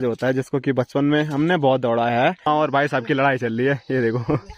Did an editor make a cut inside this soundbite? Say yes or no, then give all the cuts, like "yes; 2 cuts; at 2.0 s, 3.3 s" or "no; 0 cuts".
yes; 1 cut; at 2.5 s